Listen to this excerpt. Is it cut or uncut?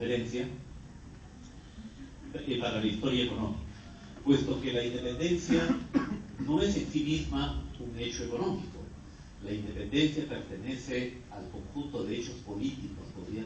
uncut